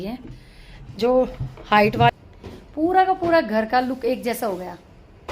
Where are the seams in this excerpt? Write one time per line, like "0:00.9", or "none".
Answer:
0:02.1